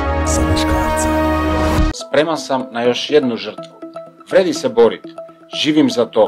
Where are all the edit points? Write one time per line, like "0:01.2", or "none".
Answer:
0:02.0

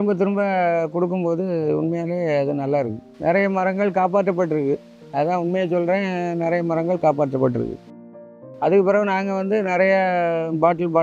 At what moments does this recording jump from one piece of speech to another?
0:03.0
0:07.9

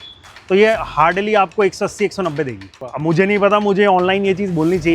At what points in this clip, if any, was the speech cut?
0:02.9

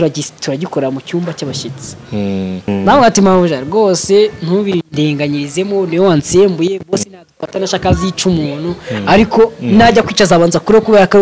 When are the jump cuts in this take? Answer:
0:02.7

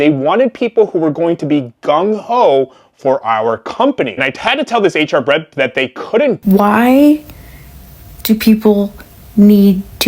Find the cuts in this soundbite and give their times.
0:06.4

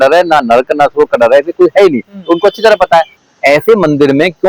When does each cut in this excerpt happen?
0:03.2

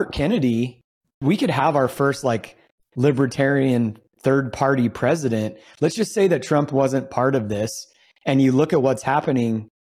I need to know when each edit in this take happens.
0:01.2

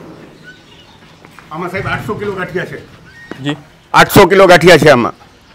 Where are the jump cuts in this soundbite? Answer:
none

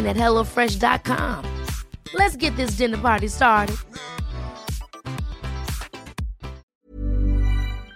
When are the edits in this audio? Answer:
0:06.7

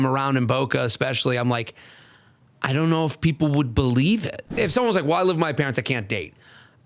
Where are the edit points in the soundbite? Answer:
0:04.5

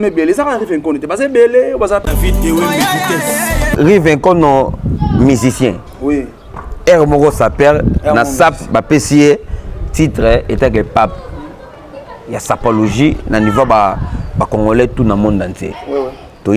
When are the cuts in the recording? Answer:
0:02.1

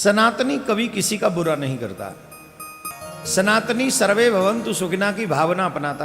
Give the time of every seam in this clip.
0:02.9

